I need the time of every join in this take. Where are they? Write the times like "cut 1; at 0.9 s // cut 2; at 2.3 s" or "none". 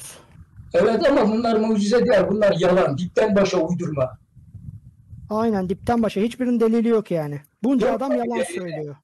none